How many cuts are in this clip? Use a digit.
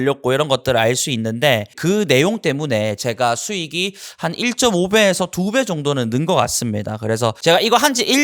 2